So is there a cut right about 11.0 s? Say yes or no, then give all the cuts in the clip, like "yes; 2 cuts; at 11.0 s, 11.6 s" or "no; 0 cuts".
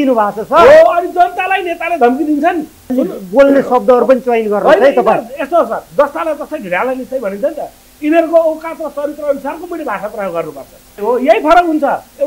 yes; 2 cuts; at 2.9 s, 11.0 s